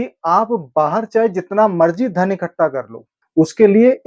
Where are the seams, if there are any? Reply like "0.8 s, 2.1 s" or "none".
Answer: 3.2 s